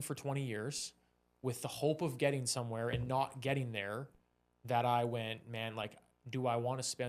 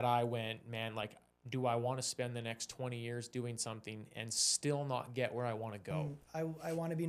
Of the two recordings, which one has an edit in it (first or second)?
second